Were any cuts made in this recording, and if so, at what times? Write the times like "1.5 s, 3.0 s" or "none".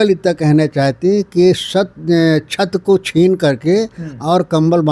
none